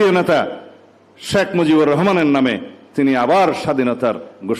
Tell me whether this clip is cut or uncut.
uncut